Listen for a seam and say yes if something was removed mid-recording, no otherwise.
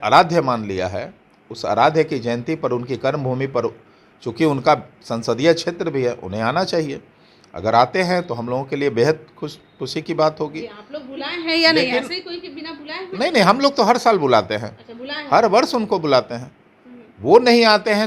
no